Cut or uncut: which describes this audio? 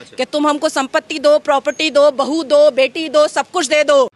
uncut